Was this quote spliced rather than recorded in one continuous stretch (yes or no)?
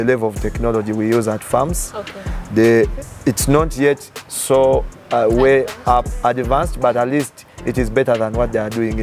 no